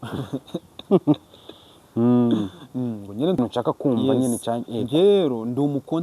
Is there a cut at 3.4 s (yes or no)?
yes